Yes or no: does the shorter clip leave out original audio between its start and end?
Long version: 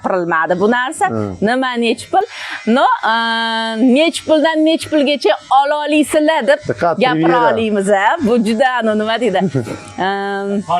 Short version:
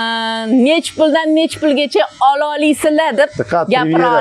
no